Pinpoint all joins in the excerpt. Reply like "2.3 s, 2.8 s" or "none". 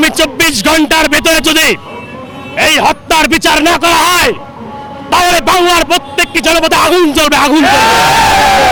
none